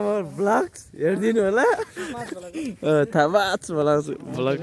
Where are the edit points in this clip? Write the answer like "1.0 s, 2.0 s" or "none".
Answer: none